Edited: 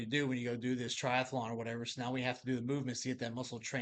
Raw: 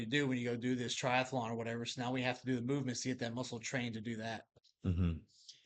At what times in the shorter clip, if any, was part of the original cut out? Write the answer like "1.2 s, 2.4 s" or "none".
none